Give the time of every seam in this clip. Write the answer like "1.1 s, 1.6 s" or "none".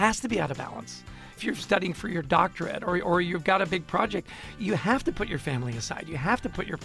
1.4 s, 4.5 s